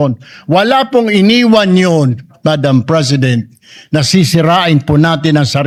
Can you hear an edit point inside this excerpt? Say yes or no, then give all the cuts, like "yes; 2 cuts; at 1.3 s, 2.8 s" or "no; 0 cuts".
no; 0 cuts